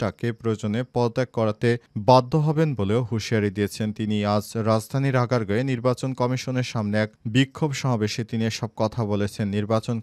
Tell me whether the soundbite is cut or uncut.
uncut